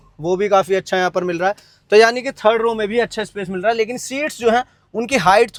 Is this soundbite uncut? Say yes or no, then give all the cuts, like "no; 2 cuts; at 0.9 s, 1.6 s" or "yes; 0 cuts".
yes; 0 cuts